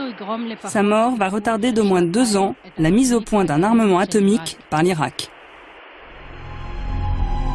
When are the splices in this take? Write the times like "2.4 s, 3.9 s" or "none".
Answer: 6.3 s